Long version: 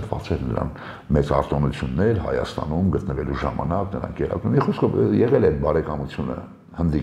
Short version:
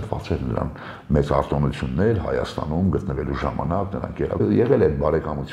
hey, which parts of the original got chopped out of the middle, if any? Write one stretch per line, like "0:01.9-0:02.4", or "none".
0:04.4-0:05.0